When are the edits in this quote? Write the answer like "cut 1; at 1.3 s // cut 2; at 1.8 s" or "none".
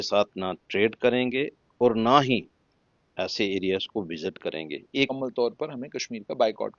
cut 1; at 5.1 s